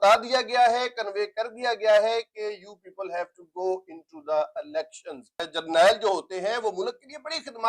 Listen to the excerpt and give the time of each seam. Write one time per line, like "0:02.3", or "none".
0:05.5